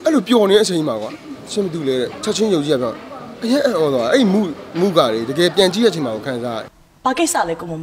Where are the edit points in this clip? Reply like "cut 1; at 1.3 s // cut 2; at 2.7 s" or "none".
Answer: cut 1; at 6.7 s